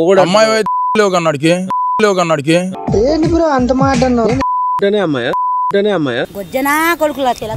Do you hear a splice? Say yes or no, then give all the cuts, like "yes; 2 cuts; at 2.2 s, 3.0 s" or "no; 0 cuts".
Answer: no; 0 cuts